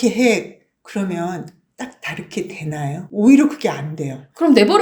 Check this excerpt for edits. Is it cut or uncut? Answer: cut